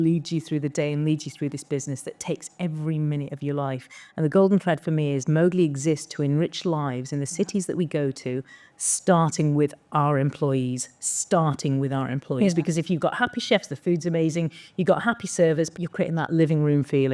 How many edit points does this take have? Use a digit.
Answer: 1